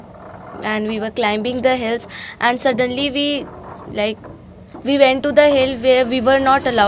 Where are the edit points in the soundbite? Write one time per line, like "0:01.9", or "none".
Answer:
none